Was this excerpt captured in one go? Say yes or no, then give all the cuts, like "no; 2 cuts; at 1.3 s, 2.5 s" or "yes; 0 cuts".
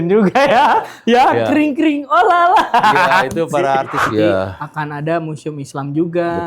no; 1 cut; at 4.1 s